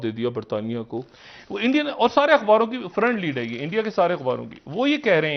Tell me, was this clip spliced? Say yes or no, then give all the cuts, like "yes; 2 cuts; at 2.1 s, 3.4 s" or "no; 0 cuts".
yes; 1 cut; at 1.0 s